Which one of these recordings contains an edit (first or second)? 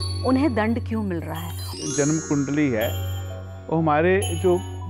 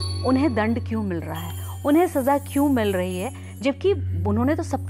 first